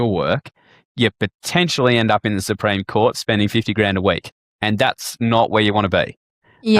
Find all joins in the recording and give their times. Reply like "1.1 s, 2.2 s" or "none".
none